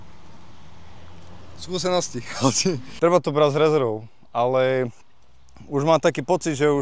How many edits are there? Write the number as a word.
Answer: one